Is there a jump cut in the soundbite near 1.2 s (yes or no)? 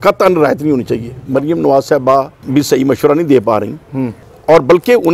yes